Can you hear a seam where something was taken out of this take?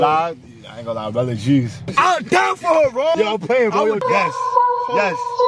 yes; 3 cuts; at 1.8 s, 3.2 s, 4.0 s

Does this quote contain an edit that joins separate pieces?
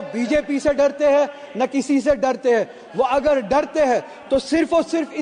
no; 0 cuts

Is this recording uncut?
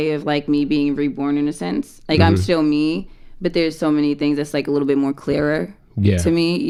yes; 0 cuts

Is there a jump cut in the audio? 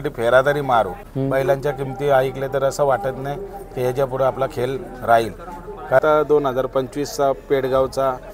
yes; 2 cuts; at 1.0 s, 6.0 s

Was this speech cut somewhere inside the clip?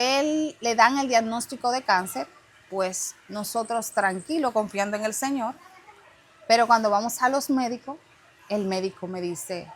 no; 0 cuts

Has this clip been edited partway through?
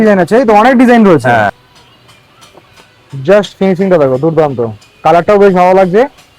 yes; 1 cut; at 1.6 s

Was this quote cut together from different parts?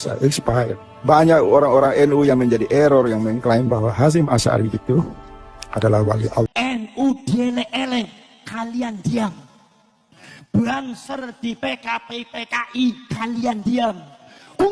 yes; 1 cut; at 6.5 s

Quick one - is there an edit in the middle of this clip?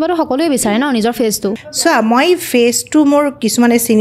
no; 0 cuts

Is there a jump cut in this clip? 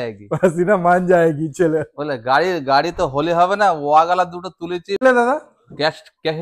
yes; 1 cut; at 5.0 s

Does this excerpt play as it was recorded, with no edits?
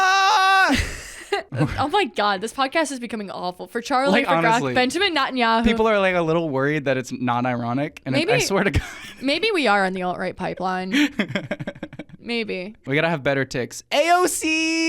no; 2 cuts; at 1.5 s, 12.8 s

